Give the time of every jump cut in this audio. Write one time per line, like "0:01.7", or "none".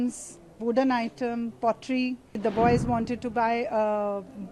0:02.4